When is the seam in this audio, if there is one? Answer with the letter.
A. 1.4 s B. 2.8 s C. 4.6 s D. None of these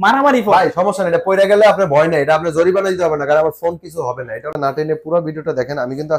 C